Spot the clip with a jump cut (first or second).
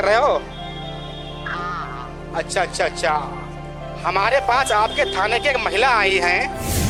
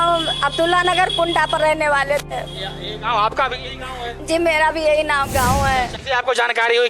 second